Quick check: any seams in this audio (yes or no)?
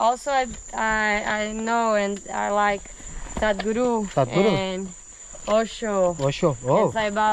no